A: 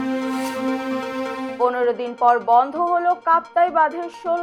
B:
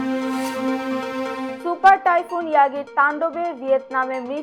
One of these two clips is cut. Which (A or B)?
B